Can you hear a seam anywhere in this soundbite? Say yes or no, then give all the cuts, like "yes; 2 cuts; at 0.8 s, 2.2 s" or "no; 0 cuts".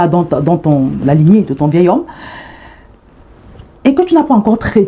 no; 0 cuts